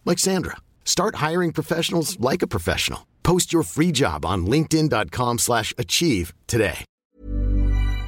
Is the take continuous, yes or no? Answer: no